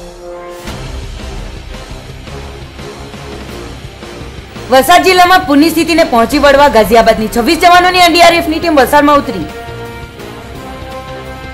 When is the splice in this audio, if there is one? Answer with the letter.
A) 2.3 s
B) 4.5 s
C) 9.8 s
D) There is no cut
B